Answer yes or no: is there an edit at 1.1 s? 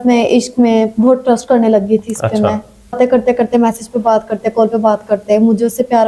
no